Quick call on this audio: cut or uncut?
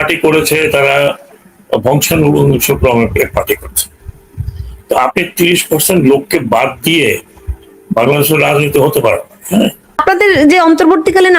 cut